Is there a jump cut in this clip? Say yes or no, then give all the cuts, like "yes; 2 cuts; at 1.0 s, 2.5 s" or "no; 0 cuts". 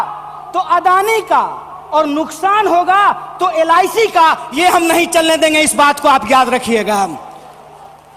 no; 0 cuts